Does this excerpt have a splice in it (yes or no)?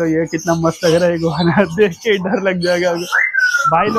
no